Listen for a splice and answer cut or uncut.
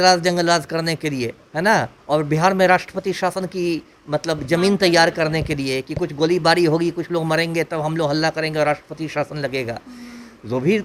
uncut